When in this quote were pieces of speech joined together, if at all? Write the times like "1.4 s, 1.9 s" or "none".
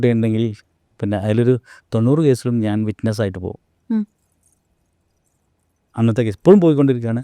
none